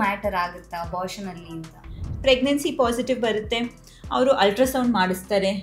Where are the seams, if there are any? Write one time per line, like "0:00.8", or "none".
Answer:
0:02.1

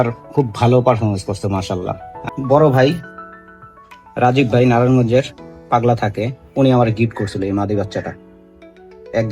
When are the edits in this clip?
0:02.2

